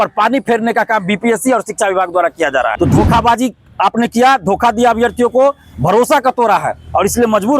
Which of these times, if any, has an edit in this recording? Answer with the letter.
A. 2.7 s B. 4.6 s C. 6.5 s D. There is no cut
A